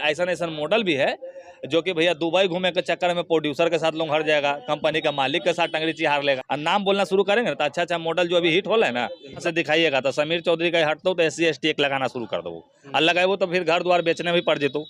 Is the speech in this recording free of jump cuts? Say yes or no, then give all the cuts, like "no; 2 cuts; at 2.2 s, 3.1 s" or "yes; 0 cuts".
no; 2 cuts; at 6.4 s, 9.4 s